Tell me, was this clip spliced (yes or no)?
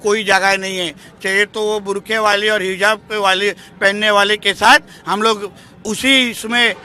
no